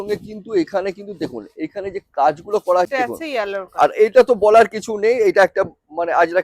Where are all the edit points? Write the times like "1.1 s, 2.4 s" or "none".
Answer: 2.9 s